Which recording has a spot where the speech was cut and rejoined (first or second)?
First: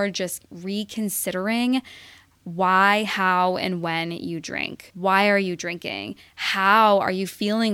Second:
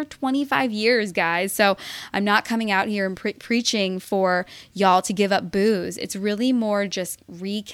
first